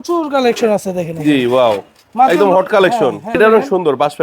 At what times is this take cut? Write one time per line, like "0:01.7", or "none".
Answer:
0:03.3